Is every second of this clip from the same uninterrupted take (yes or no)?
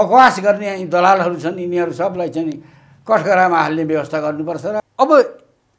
no